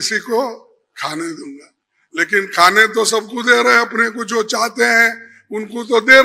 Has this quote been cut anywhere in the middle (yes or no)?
no